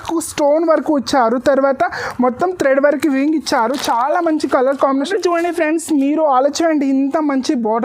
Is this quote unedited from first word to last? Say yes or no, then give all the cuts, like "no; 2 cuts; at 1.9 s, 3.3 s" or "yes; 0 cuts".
no; 1 cut; at 5.1 s